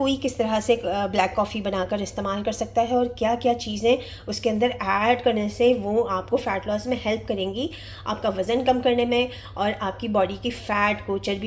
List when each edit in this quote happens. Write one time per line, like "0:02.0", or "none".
none

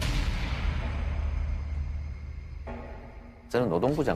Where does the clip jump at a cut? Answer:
0:02.5

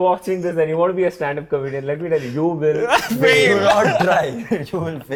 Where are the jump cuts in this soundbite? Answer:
none

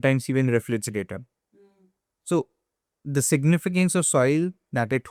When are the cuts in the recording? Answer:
none

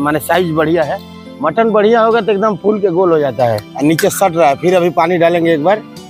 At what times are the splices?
0:03.6

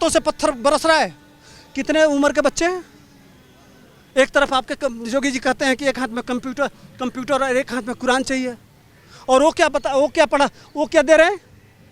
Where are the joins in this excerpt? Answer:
none

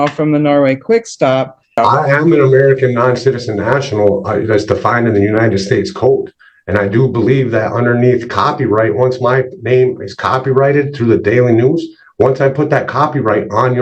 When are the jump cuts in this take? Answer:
0:01.7

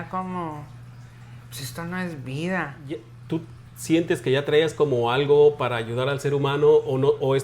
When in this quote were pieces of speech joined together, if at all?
0:03.1

